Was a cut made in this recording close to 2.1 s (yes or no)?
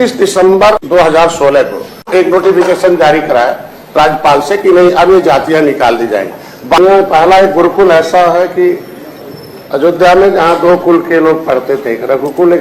yes